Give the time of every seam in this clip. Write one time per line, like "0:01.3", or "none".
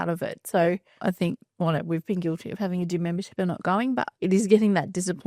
none